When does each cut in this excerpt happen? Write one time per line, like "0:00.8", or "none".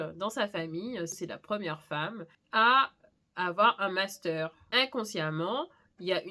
0:01.1
0:02.2
0:04.6